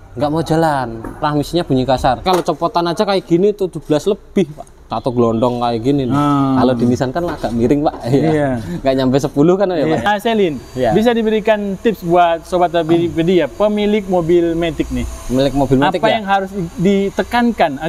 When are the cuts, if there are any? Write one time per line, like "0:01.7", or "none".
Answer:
0:01.1
0:02.3
0:04.9
0:10.0